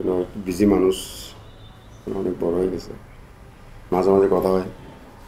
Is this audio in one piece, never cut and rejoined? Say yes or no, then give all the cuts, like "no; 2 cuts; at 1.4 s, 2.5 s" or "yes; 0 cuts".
yes; 0 cuts